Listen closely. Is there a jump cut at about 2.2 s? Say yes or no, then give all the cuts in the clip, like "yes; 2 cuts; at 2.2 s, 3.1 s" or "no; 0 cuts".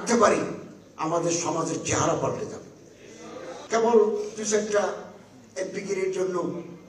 no; 1 cut; at 3.5 s